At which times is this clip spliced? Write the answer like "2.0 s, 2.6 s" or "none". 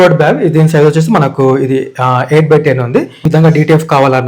3.2 s